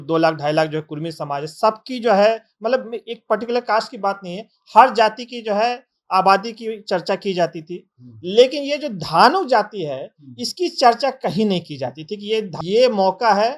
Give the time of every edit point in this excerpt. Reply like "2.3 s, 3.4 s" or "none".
12.5 s